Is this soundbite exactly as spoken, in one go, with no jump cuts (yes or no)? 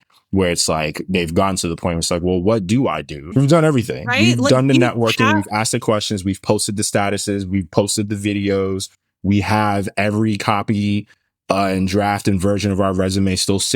no